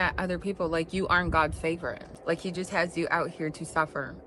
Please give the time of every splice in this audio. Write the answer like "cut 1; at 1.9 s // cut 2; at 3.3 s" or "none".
cut 1; at 2.1 s